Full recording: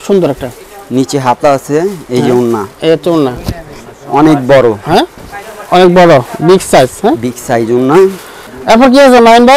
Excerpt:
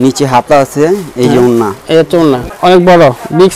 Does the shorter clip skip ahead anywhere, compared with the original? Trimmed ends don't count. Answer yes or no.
yes